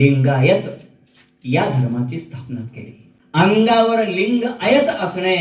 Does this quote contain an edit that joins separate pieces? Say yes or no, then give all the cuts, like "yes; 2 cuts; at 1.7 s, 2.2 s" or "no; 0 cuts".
yes; 1 cut; at 3.6 s